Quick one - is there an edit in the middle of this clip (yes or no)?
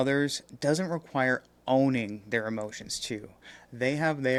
no